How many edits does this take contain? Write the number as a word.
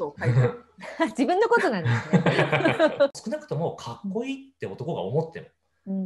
one